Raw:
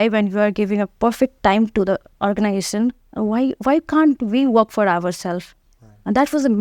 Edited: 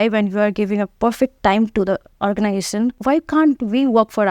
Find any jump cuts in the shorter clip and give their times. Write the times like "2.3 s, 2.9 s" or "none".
3.0 s